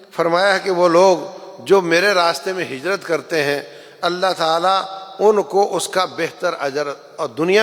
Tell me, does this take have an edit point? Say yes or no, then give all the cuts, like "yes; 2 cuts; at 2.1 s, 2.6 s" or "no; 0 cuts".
no; 0 cuts